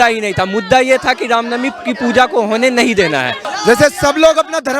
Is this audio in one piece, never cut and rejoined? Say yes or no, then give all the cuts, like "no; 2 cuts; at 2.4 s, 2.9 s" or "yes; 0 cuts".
no; 1 cut; at 3.5 s